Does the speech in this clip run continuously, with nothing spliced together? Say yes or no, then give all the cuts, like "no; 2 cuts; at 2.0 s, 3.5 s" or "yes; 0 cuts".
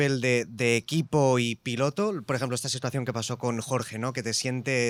yes; 0 cuts